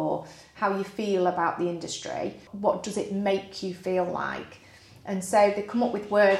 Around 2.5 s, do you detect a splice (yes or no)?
yes